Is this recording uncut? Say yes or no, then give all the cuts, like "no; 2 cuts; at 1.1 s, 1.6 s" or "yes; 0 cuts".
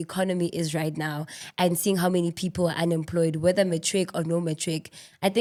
yes; 0 cuts